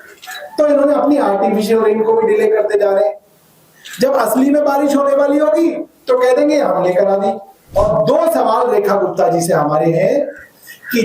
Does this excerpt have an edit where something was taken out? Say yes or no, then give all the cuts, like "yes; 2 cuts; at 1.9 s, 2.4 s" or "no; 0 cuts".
yes; 1 cut; at 7.5 s